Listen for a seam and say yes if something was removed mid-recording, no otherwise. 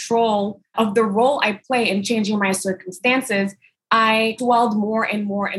yes